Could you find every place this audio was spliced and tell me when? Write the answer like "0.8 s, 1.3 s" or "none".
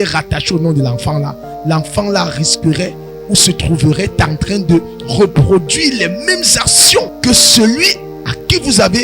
7.1 s

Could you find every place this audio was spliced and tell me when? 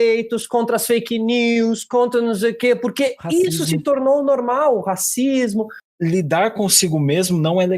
5.8 s

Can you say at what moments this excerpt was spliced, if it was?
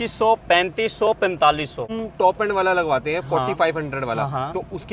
2.0 s

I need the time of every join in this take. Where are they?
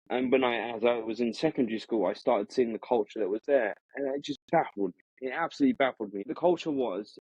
6.2 s

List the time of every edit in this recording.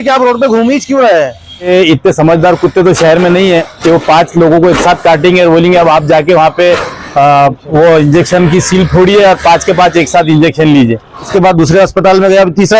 1.7 s, 11.3 s

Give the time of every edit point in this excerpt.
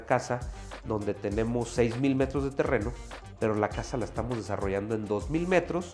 none

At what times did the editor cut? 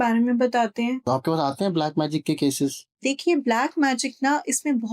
1.0 s, 3.0 s

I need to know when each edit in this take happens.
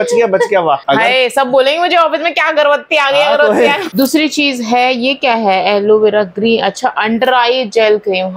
0.8 s, 3.8 s

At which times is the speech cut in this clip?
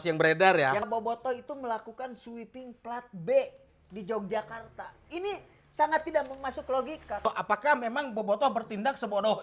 0.8 s, 7.3 s

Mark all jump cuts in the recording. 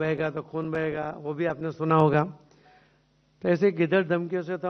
none

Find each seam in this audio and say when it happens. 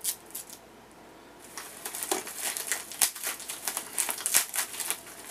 1.5 s

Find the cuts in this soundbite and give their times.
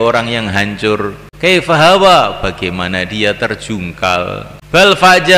1.2 s, 4.5 s

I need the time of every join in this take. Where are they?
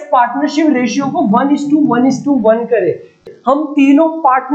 3.2 s

